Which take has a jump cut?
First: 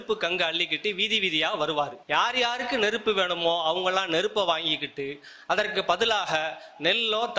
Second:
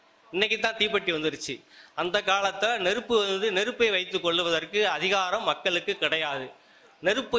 first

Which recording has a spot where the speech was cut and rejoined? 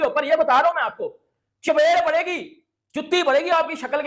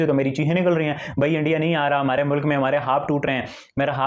first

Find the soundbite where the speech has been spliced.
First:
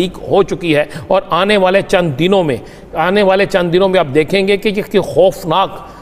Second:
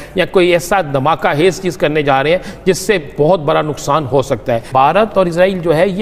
second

